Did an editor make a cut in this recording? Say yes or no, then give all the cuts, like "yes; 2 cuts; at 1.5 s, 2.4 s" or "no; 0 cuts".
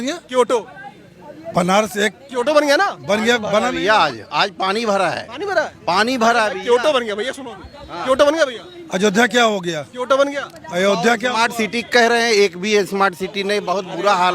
no; 0 cuts